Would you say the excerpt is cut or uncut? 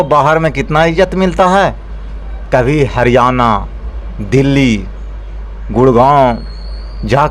uncut